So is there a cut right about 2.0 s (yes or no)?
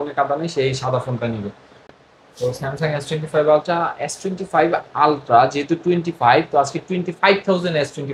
yes